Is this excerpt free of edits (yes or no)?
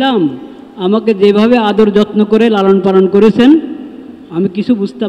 yes